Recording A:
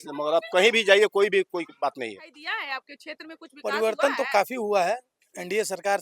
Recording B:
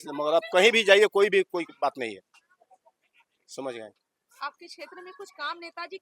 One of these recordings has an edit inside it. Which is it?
A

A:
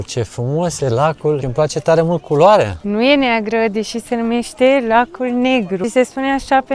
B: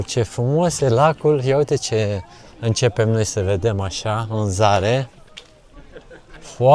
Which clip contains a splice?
A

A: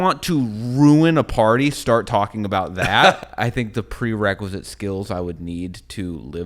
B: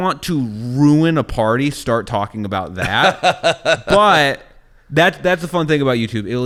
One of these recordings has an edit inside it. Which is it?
A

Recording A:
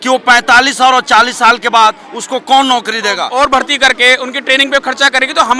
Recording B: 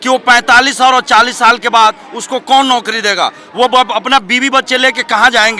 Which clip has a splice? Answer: A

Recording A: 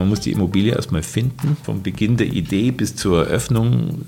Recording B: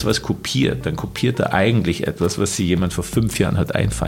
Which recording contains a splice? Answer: A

